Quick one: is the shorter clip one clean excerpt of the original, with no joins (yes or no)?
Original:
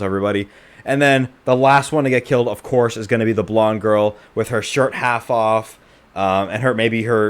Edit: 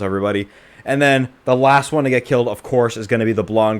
yes